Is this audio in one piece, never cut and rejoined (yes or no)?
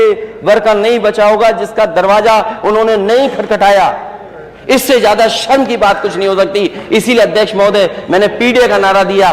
yes